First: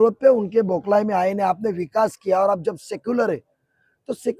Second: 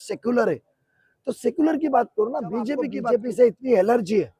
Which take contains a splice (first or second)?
second